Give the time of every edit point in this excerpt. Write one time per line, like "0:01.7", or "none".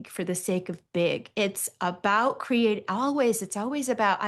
none